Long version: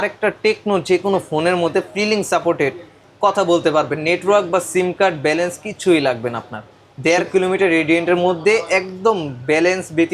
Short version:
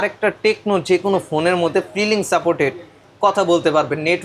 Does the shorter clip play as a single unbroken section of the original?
yes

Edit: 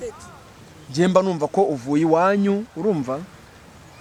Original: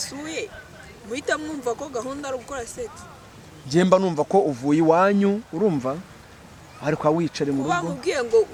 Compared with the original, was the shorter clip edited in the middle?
no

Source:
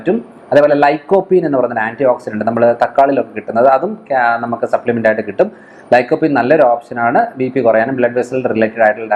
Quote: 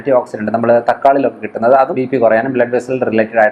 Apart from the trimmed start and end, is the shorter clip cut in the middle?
yes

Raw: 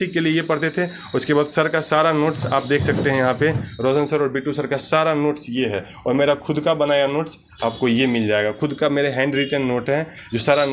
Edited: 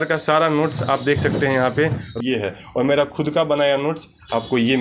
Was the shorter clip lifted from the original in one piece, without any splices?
no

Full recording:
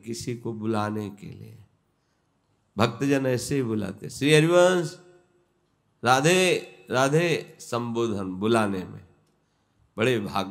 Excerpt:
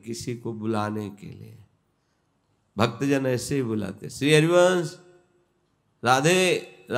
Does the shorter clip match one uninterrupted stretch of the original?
yes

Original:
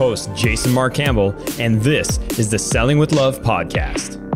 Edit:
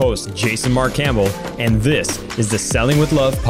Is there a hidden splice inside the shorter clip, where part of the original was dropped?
no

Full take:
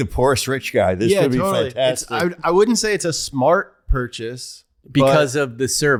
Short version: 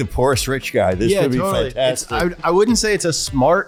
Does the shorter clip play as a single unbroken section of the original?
yes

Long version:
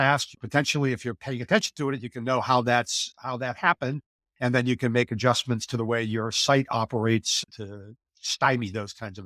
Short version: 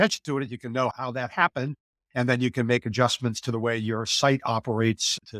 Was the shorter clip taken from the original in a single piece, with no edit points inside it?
no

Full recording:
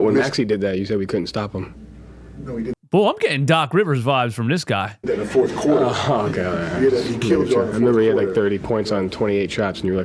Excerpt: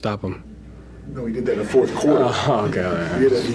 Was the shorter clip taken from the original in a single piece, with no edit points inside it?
no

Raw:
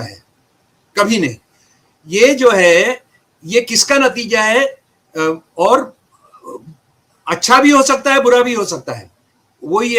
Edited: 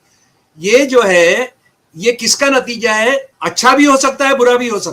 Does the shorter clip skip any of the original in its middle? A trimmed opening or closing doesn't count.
yes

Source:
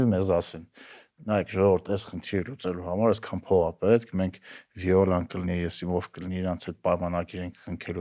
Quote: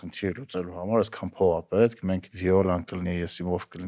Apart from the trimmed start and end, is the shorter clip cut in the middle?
yes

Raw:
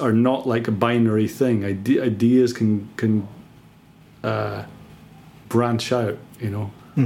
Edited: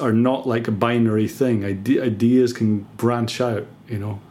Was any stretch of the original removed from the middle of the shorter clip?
yes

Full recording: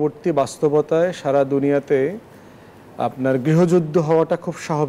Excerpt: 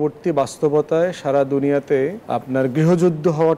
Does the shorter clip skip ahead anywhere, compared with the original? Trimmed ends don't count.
yes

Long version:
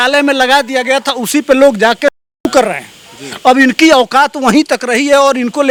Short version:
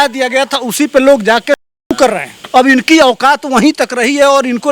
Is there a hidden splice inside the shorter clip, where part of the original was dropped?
yes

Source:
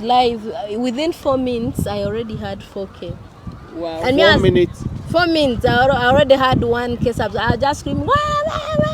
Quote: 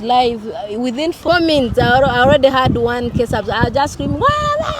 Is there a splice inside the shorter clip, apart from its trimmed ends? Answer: yes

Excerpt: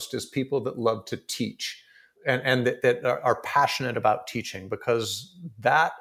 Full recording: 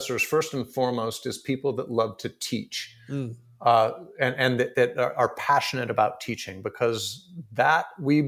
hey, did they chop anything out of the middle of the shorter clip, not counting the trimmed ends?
yes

